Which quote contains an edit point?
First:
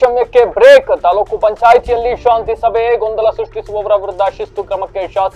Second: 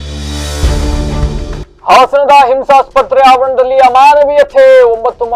second; 1 cut; at 1.1 s

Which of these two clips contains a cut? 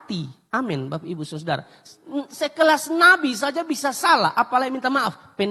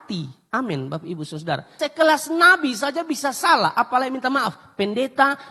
second; 1 cut; at 1.7 s

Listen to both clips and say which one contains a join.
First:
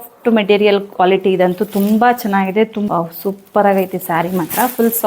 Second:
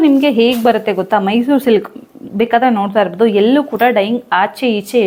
first; 1 cut; at 2.8 s

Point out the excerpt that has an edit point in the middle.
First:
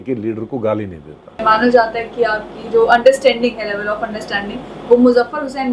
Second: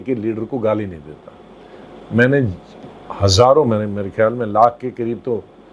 first; 1 cut; at 1.4 s

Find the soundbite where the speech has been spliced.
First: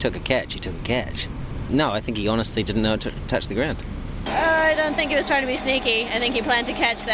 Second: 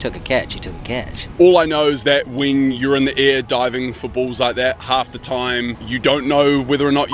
second; 3 cuts; at 1.2 s, 4.8 s, 5.9 s

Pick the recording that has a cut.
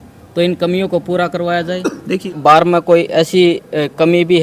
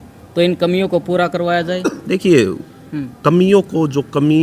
first; 1 cut; at 2.2 s

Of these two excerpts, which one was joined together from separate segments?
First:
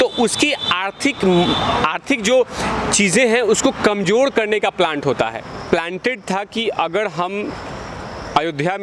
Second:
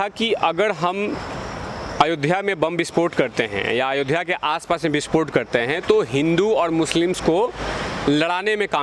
first; 1 cut; at 5.4 s

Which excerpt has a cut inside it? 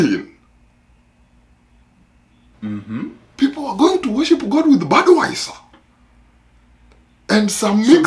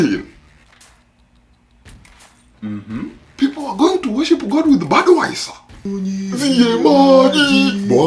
second; 1 cut; at 5.9 s

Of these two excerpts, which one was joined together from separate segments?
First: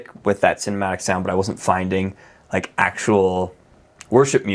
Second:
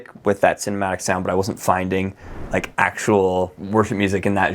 second; 1 cut; at 3.6 s

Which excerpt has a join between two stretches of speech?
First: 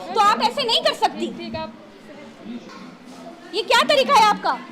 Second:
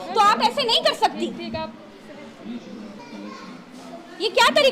first; 1 cut; at 2.7 s

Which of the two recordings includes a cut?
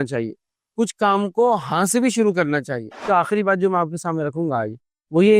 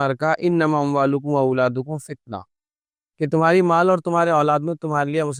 first; 1 cut; at 3.1 s

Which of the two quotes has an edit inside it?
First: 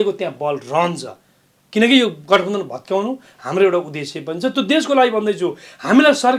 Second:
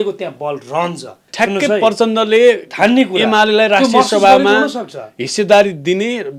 second; 1 cut; at 1.2 s

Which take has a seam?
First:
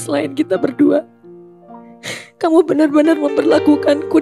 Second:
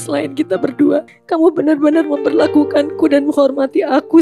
second; 1 cut; at 1.2 s

